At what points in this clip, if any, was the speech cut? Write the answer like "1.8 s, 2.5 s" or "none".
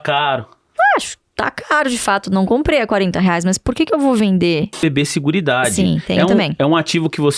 4.7 s